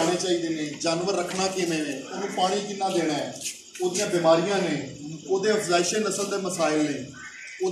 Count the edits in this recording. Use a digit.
0